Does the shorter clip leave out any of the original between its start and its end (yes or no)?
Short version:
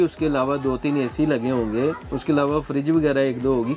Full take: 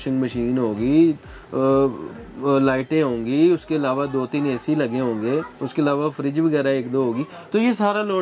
no